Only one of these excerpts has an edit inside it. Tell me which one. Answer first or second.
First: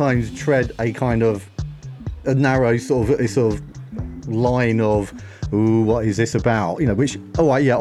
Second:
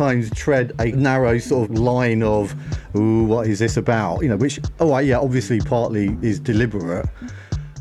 second